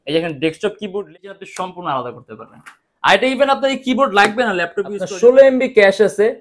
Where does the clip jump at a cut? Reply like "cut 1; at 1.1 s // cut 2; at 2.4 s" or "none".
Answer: cut 1; at 1.0 s // cut 2; at 5.0 s